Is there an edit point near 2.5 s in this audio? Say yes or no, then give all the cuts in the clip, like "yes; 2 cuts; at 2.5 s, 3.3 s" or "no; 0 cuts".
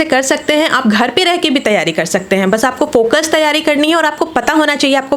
no; 0 cuts